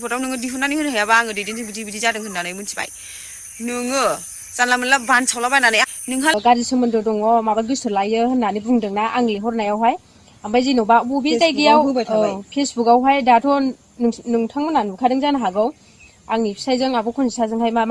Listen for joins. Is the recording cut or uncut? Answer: cut